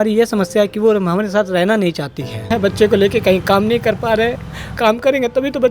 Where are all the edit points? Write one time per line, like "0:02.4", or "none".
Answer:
0:02.5
0:04.7